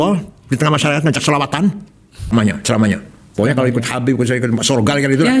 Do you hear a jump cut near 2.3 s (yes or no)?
yes